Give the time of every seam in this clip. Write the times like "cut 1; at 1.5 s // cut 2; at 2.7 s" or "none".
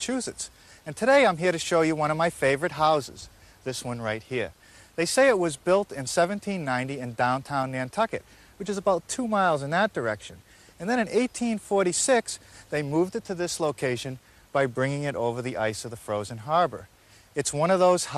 cut 1; at 8.1 s